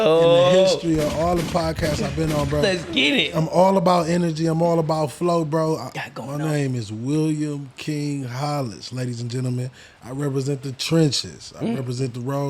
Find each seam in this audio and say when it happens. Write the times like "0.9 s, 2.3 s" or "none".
5.9 s